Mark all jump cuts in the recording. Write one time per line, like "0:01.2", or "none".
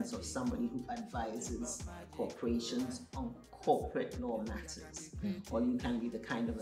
none